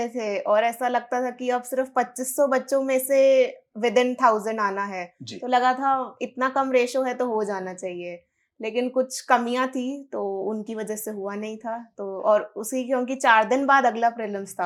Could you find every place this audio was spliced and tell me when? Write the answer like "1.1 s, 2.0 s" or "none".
none